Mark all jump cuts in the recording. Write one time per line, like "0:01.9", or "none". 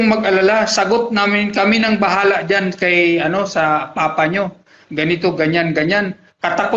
none